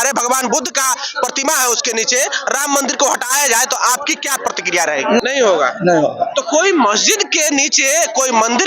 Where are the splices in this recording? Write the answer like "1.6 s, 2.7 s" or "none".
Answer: 5.2 s